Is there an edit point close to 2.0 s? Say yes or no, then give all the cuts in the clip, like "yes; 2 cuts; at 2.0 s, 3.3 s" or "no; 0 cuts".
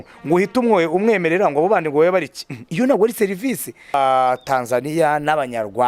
no; 1 cut; at 3.9 s